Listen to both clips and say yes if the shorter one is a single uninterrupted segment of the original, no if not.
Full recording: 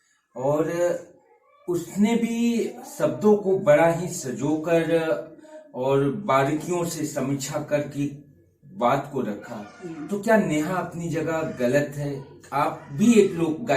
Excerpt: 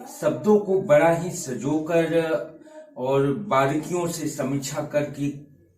yes